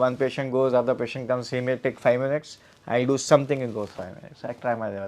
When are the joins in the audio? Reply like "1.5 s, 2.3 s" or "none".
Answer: none